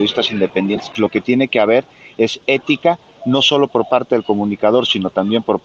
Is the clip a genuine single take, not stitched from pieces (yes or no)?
no